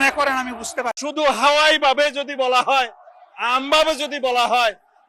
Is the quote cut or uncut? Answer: cut